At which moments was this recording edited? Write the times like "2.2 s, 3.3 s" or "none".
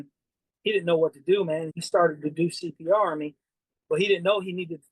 1.8 s